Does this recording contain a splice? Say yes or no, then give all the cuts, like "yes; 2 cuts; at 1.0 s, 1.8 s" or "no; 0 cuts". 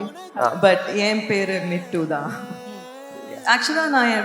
yes; 1 cut; at 3.2 s